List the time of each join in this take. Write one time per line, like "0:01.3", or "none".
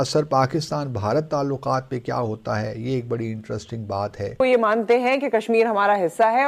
0:04.4